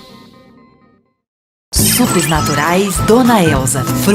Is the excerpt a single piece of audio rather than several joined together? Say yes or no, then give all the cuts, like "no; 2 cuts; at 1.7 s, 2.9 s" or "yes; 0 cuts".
no; 1 cut; at 1.6 s